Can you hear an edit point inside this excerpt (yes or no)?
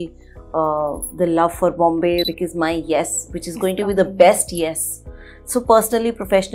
yes